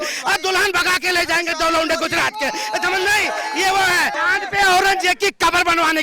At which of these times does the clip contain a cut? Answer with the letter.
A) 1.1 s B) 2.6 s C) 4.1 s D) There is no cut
C